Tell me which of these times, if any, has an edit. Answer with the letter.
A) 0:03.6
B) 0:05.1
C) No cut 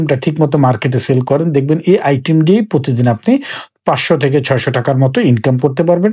C